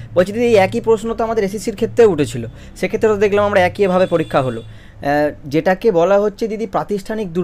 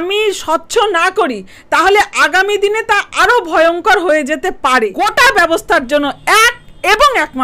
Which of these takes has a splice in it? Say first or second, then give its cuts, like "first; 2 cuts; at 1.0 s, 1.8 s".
second; 1 cut; at 4.9 s